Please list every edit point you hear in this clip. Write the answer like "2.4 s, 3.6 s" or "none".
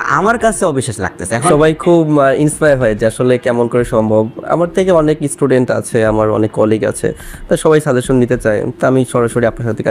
1.5 s